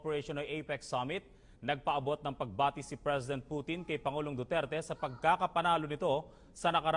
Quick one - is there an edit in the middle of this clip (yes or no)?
no